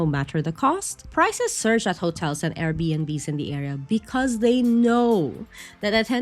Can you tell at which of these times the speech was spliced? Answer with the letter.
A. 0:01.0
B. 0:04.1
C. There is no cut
A